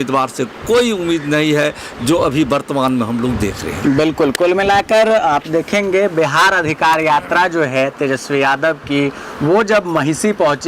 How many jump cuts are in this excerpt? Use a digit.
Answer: 0